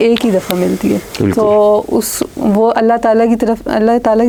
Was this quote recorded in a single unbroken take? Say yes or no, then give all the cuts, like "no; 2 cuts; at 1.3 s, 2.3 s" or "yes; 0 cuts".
yes; 0 cuts